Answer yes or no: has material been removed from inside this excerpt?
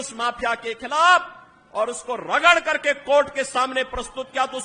no